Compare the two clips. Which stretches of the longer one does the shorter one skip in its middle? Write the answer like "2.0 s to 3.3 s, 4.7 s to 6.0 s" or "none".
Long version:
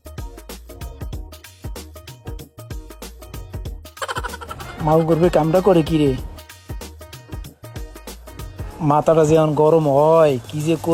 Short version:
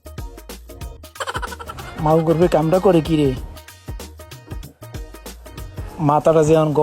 0.9 s to 3.7 s